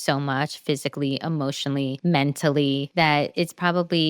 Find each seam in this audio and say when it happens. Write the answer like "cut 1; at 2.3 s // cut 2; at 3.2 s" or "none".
cut 1; at 2.0 s // cut 2; at 2.9 s